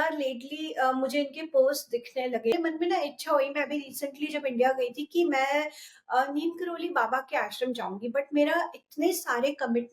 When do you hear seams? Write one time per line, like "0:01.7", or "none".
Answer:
0:02.5